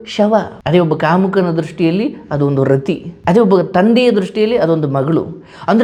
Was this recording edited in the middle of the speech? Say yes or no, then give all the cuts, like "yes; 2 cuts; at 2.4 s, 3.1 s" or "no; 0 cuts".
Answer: no; 0 cuts